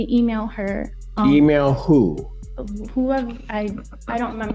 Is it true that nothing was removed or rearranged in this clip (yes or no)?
yes